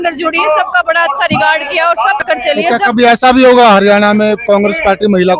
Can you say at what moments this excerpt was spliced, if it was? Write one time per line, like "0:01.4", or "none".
0:02.2